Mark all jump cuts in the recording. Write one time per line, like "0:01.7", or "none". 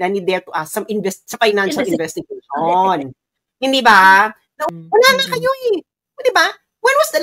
0:04.5